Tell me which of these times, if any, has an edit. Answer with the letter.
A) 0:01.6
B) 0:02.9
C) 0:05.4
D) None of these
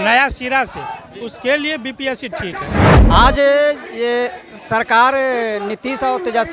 B